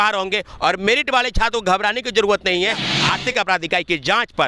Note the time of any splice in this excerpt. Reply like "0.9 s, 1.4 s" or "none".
2.9 s